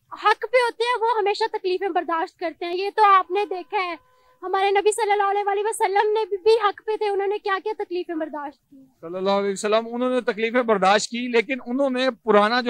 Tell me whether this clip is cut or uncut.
uncut